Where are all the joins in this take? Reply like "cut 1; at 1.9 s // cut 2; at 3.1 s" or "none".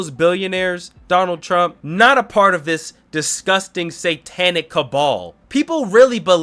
cut 1; at 1.8 s // cut 2; at 5.4 s